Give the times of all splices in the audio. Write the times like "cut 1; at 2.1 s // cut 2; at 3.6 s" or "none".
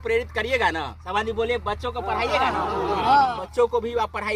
cut 1; at 1.0 s // cut 2; at 3.4 s